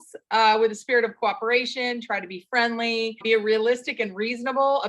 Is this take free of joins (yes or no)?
no